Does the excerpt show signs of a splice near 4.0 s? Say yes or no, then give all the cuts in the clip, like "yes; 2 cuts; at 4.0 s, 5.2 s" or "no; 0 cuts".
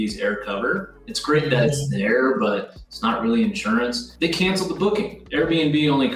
yes; 2 cuts; at 4.0 s, 5.2 s